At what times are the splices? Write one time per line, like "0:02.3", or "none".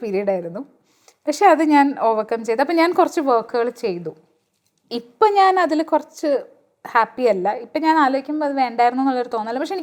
none